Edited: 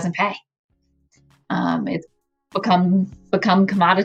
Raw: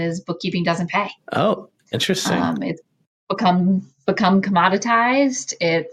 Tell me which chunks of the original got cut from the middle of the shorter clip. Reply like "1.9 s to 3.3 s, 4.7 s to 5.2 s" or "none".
none